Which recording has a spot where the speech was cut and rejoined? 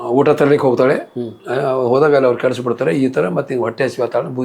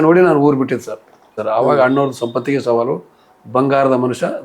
second; 1 cut; at 1.4 s

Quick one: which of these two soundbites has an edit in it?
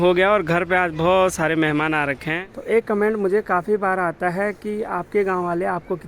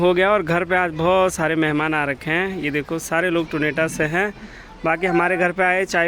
first; 1 cut; at 2.3 s

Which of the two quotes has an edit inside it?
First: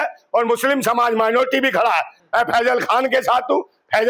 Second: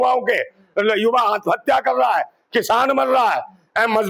first; 1 cut; at 2.1 s

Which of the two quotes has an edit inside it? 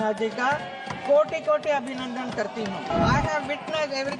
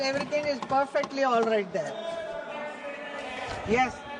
first; 1 cut; at 2.9 s

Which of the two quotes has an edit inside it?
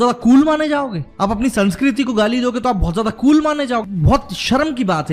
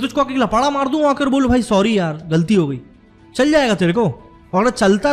first; 2 cuts; at 1.0 s, 3.8 s

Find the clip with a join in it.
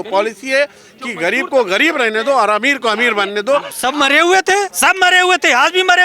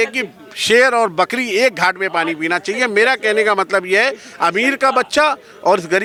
first; 2 cuts; at 3.7 s, 4.7 s

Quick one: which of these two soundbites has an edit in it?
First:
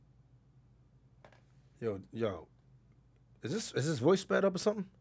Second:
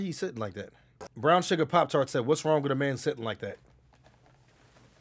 second; 1 cut; at 1.1 s

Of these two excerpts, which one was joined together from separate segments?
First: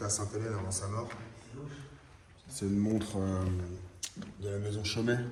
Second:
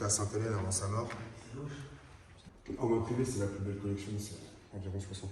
second; 1 cut; at 2.5 s

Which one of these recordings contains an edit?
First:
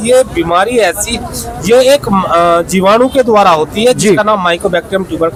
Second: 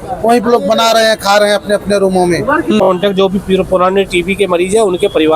second; 1 cut; at 2.8 s

